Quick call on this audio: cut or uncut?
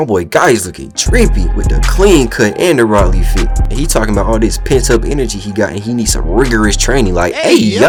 uncut